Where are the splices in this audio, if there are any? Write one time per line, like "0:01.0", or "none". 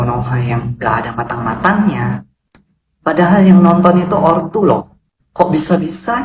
none